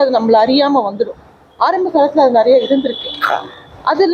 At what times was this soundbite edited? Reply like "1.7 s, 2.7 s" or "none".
none